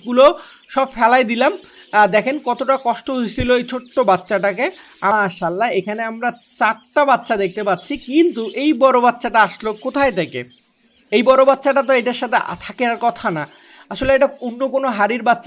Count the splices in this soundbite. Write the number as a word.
one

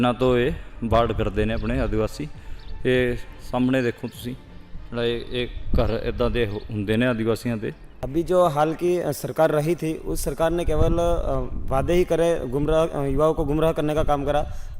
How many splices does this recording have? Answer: one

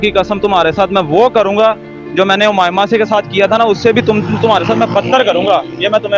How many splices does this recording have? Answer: zero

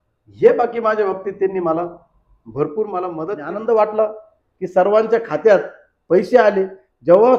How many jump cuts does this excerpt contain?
one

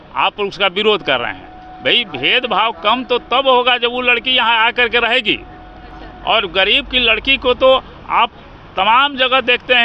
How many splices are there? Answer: zero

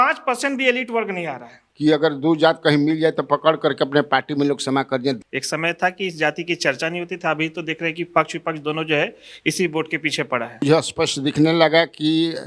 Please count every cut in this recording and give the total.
three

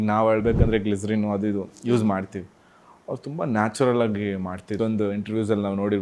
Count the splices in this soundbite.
one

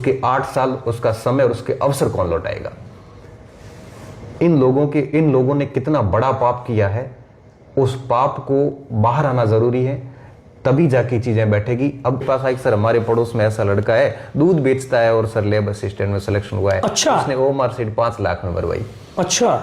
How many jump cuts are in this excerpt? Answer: one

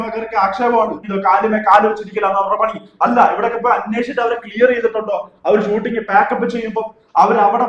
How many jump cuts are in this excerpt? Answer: one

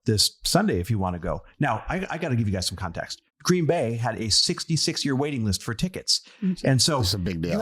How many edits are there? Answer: one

